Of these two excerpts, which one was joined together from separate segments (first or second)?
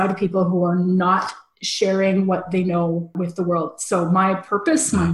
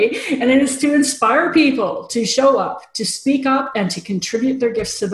first